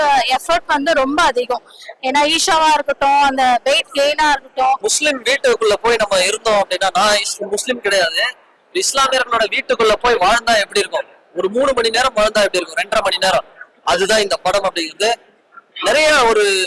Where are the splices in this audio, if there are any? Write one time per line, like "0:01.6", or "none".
0:04.9